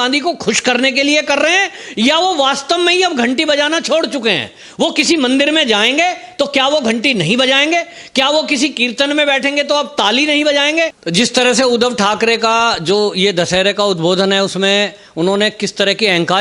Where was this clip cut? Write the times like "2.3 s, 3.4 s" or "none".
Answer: 11.0 s